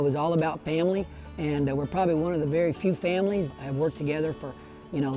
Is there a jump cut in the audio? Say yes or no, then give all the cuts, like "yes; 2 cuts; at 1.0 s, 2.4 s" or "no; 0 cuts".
yes; 1 cut; at 3.5 s